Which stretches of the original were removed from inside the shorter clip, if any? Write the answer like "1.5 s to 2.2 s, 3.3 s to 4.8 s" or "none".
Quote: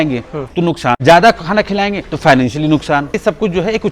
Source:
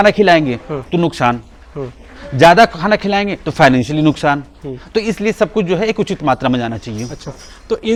1.4 s to 2.3 s, 4.5 s to 5.3 s